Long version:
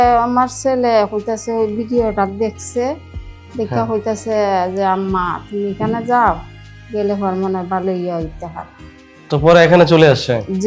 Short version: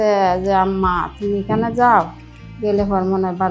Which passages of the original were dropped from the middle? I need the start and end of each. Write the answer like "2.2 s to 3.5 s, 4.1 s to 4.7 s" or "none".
none

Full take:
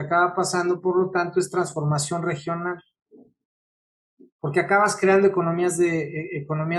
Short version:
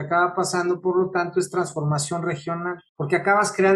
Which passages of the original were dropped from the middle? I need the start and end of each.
2.9 s to 4.3 s

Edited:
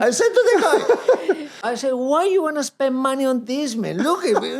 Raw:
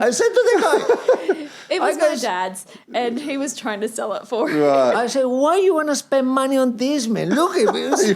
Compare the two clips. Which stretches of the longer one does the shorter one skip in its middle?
1.7 s to 5.0 s

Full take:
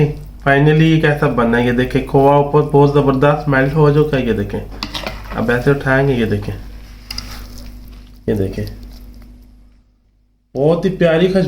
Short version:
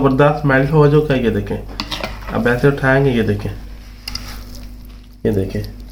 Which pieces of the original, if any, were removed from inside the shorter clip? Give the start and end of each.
none

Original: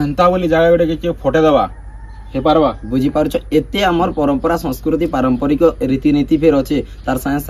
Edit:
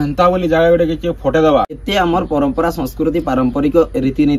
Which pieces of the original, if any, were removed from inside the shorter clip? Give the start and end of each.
1.8 s to 3.7 s

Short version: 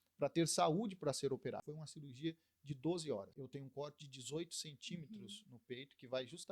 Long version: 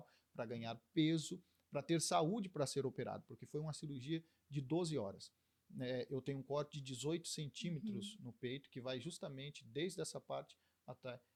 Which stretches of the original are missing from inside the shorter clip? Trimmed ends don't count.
3.3 s to 3.6 s, 5.3 s to 6.1 s

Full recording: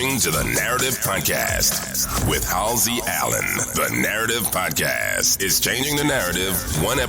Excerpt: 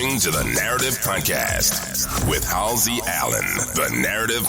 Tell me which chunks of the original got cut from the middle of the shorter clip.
none

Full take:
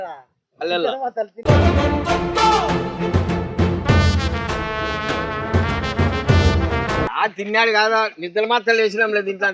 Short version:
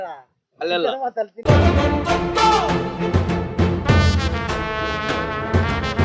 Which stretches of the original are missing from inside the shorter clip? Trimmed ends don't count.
none

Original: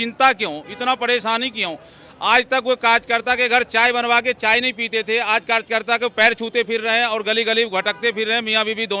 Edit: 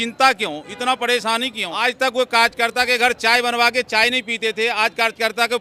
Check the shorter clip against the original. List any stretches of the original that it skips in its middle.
1.6 s to 2.1 s

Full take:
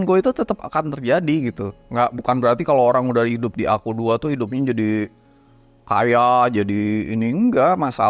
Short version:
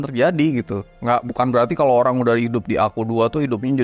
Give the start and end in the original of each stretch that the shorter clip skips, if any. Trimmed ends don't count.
none

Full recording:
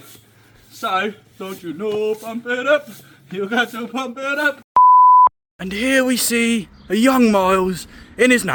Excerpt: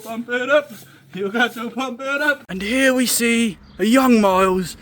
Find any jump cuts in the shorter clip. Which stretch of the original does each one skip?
4.6 s to 5.5 s

